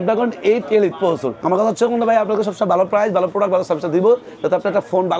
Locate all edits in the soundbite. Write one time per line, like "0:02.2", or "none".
0:01.3